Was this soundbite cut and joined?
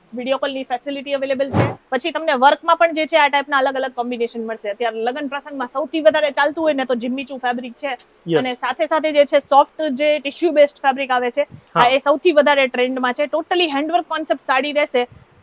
yes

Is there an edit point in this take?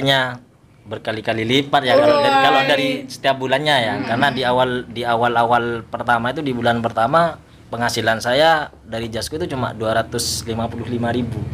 no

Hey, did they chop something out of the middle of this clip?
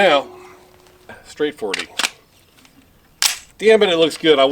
yes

